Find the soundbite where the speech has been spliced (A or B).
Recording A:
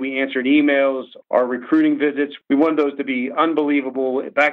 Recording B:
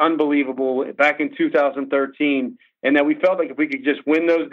A